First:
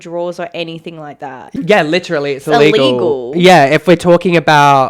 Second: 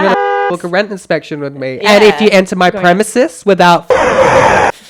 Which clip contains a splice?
first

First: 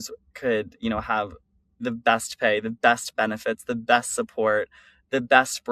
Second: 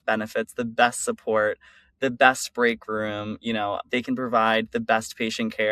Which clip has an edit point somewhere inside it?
second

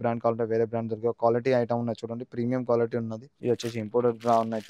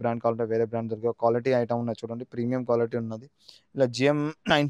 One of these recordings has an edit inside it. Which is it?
first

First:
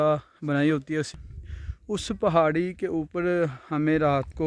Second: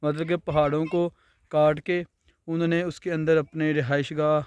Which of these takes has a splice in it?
first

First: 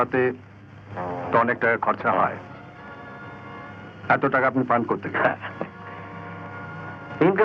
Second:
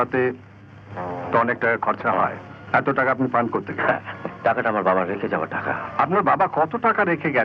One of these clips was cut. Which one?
second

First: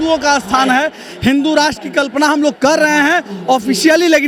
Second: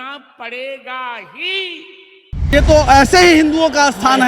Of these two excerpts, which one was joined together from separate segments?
second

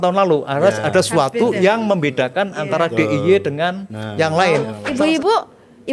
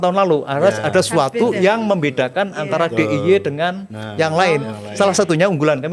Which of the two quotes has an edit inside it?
first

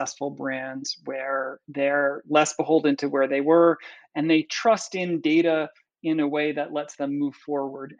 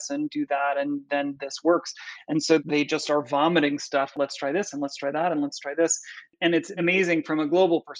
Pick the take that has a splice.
second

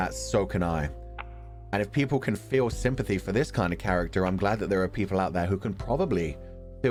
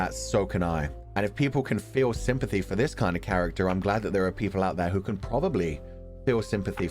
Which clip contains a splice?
second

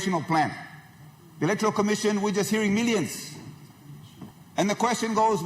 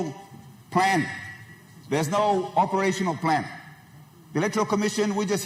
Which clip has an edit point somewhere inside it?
first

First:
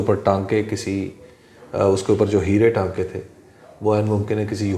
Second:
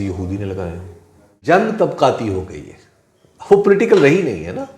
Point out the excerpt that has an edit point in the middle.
second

